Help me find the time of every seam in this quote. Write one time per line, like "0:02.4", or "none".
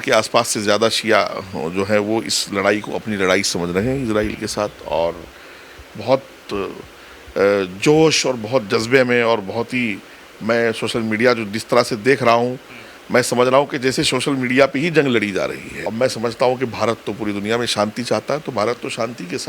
0:15.7

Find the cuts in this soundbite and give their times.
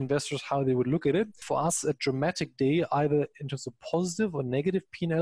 0:01.4

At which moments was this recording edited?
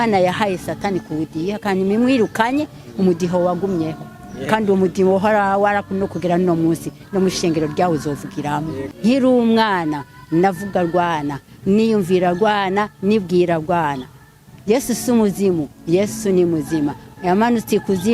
0:08.8

